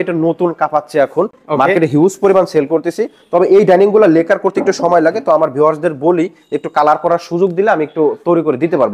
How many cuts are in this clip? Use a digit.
0